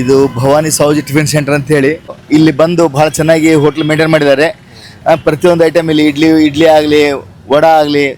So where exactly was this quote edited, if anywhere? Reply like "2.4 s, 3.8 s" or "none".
2.2 s